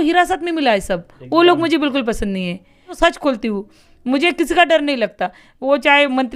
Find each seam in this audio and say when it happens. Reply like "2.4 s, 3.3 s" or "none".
3.0 s